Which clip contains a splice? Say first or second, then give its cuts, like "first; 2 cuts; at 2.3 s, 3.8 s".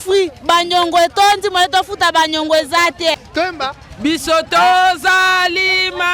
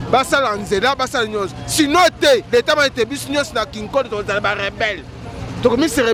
first; 1 cut; at 3.1 s